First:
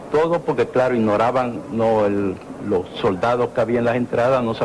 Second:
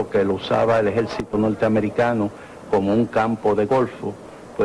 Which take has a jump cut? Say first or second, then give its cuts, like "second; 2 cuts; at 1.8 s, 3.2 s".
first; 1 cut; at 3.3 s